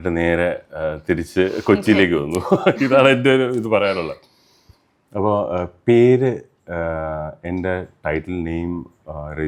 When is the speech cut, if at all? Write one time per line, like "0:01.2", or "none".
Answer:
none